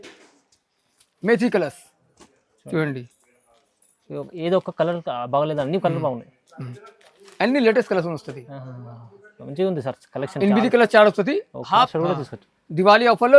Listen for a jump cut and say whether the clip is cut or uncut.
cut